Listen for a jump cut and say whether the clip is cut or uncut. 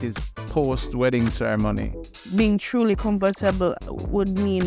cut